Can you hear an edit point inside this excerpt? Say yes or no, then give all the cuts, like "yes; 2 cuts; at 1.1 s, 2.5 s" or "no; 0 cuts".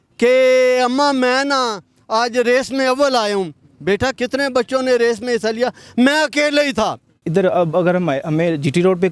yes; 2 cuts; at 4.2 s, 7.2 s